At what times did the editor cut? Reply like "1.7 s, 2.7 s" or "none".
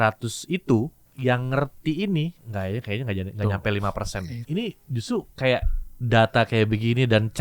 1.0 s, 2.4 s, 4.4 s